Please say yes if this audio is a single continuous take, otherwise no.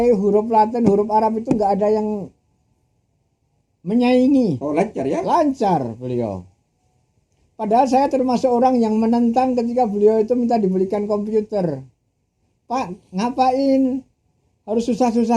yes